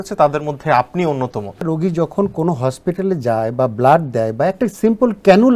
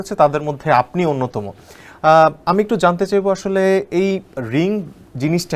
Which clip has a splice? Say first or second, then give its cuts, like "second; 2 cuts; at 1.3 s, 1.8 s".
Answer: first; 1 cut; at 1.7 s